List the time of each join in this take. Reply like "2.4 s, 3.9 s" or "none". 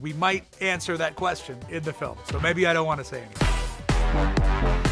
none